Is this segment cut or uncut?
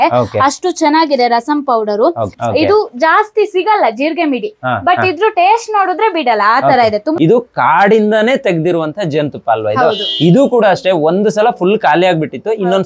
cut